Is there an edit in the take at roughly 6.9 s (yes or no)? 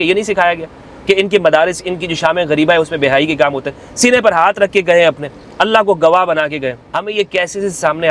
yes